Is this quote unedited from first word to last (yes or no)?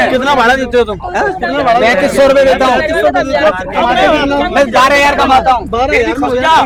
yes